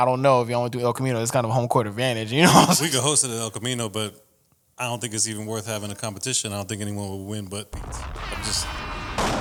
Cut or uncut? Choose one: uncut